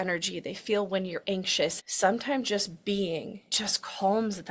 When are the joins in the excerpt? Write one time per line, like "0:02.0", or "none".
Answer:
0:01.7
0:03.5